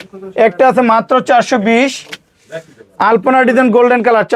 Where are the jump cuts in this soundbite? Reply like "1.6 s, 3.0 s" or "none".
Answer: none